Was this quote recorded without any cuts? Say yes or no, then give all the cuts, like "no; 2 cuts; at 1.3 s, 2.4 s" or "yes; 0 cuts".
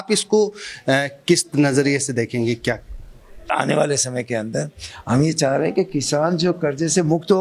no; 1 cut; at 3.5 s